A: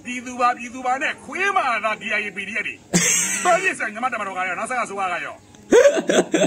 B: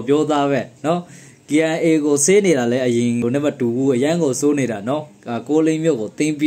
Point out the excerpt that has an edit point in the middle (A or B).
B